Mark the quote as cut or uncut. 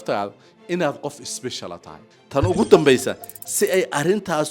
cut